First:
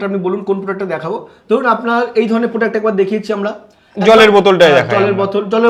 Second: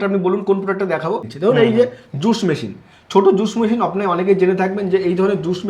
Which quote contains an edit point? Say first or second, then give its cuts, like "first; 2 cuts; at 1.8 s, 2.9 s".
second; 1 cut; at 1.3 s